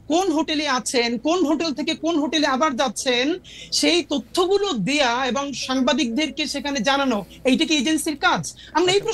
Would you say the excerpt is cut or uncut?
uncut